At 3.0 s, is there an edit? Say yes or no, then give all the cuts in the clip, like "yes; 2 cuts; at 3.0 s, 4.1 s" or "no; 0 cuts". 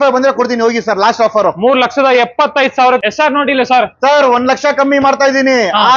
yes; 1 cut; at 3.0 s